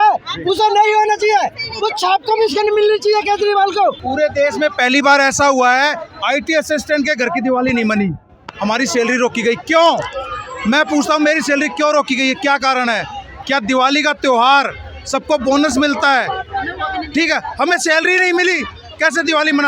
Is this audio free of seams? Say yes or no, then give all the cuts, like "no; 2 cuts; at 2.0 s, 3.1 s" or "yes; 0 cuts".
no; 1 cut; at 4.0 s